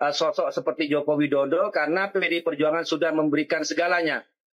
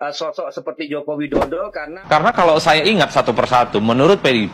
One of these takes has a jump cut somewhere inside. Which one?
second; 1 cut; at 1.9 s

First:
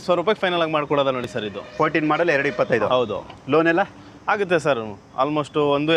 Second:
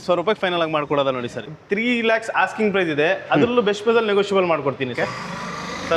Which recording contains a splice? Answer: second; 2 cuts; at 1.4 s, 5.0 s

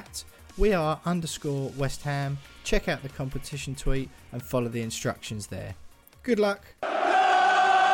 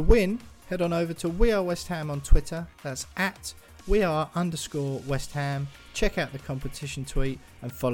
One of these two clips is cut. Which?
first; 1 cut; at 6.7 s

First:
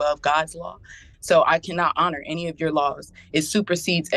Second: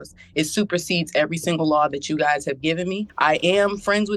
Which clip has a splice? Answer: second; 1 cut; at 3.1 s

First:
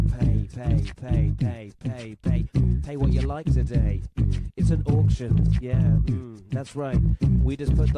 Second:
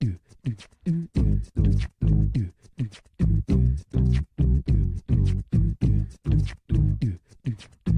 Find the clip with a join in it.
second; 1 cut; at 1.1 s

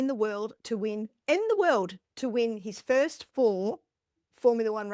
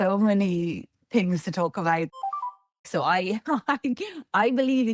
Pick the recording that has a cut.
second; 1 cut; at 2.3 s

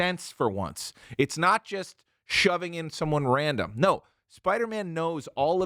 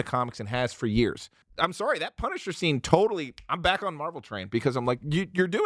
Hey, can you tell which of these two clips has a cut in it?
second; 1 cut; at 1.4 s

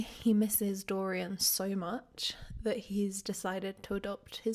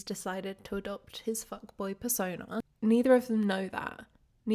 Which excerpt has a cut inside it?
second; 1 cut; at 2.7 s

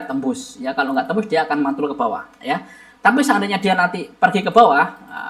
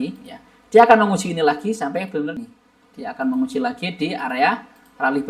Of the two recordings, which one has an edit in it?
second; 1 cut; at 2.4 s

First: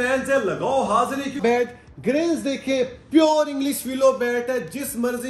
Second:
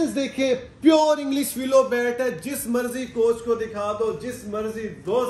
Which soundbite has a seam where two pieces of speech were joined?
first; 1 cut; at 1.4 s

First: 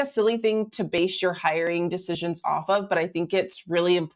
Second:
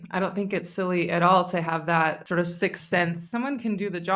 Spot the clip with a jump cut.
second; 2 cuts; at 2.2 s, 3.3 s

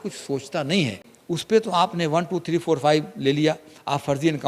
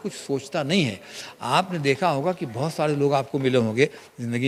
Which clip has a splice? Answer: first; 1 cut; at 1.1 s

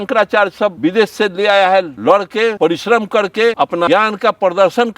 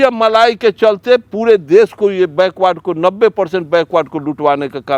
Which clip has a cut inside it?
first; 3 cuts; at 0.8 s, 2.0 s, 3.7 s

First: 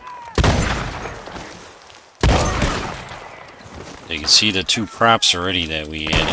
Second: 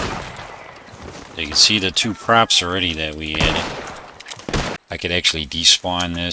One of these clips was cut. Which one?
second; 1 cut; at 4.8 s

